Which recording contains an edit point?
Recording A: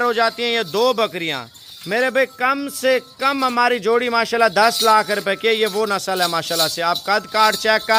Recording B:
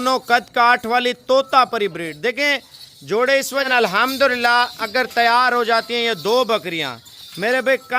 B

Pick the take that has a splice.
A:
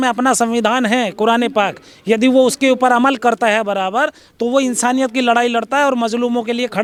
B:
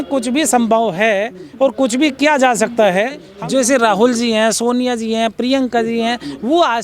B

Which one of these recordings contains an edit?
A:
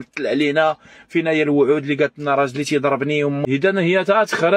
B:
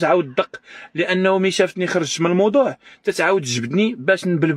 A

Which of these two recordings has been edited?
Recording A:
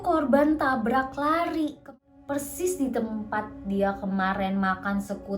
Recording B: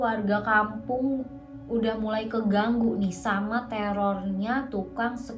A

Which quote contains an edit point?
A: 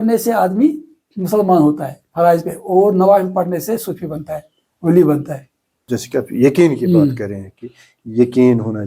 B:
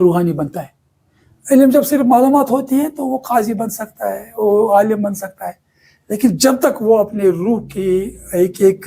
A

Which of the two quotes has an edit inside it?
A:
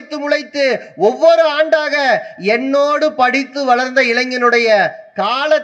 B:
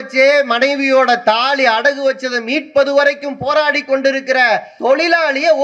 B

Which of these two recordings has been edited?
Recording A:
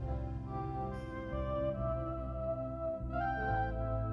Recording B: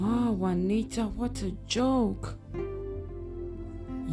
B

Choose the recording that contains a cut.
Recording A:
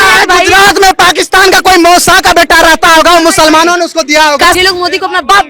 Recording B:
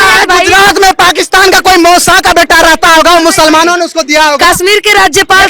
A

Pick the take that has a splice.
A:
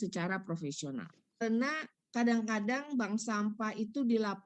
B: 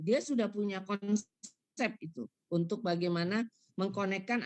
A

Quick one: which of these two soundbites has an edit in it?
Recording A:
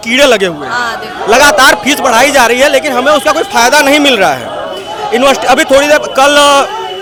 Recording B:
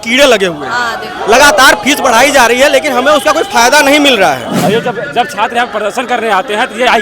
B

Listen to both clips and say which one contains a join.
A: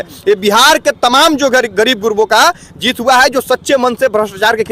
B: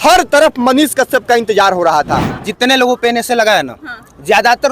B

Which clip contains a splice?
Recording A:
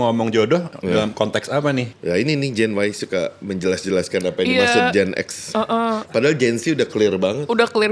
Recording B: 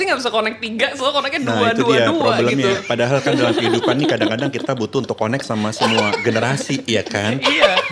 A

